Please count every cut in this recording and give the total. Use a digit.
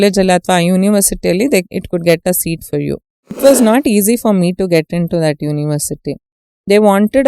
1